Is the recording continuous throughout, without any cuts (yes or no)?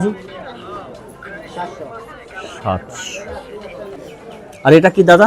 no